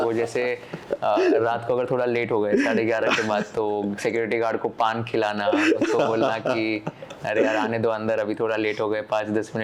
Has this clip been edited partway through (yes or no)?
no